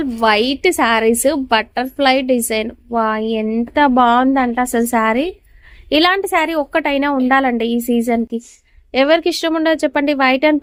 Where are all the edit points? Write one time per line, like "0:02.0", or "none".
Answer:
none